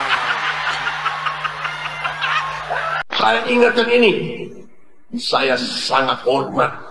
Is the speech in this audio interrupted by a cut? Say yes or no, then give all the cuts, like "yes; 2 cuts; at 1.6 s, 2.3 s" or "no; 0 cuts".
yes; 1 cut; at 3.0 s